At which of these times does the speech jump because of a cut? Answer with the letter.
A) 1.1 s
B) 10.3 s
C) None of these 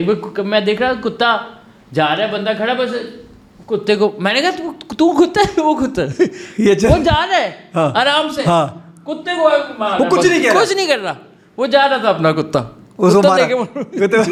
C